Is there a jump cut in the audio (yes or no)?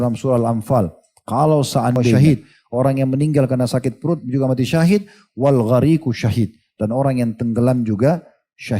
yes